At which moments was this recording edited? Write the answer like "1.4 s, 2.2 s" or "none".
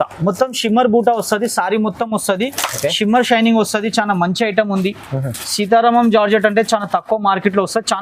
none